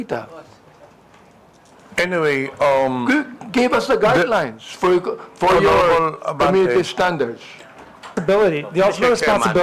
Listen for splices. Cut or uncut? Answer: cut